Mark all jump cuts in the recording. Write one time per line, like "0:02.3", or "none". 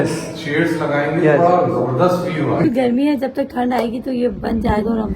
0:02.6

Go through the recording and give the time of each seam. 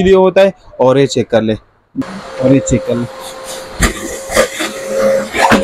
0:02.0

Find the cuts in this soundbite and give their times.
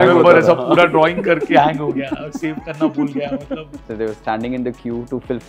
0:03.8

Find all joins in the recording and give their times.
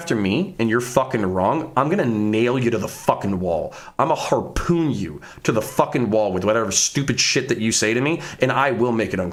none

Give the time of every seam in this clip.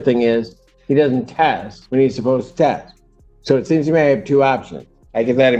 0:01.7

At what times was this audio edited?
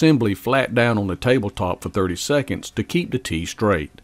none

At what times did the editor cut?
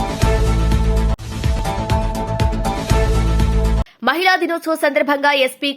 0:01.2
0:03.8

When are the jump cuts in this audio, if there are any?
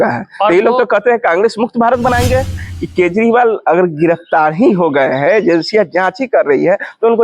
0:02.6

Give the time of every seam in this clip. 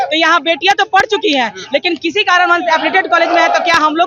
none

